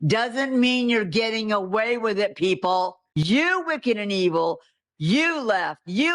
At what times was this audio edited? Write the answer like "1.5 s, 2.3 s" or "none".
3.0 s